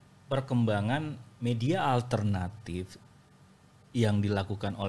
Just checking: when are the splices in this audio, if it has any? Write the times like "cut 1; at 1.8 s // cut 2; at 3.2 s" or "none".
none